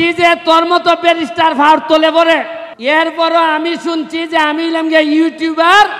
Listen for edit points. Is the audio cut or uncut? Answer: cut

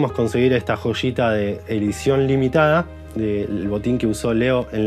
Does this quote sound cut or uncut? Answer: uncut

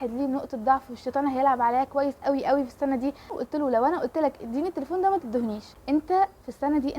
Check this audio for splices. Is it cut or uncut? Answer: cut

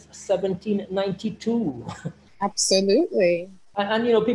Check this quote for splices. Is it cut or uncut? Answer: uncut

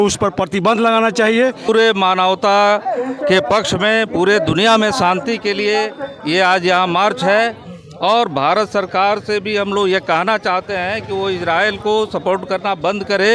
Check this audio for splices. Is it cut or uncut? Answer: cut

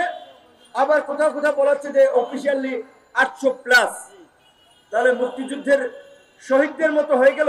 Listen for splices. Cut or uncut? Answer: uncut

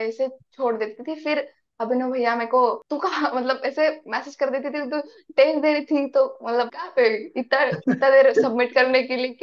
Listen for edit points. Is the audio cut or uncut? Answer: uncut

